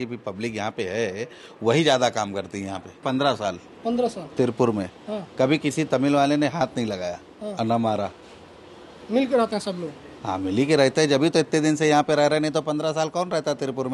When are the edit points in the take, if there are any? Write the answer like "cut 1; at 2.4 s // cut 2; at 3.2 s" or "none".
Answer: cut 1; at 3.0 s